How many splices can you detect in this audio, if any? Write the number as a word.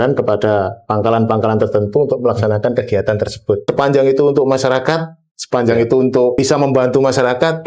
two